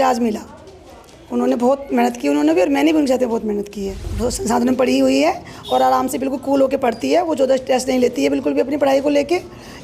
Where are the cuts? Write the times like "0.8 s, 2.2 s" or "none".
4.1 s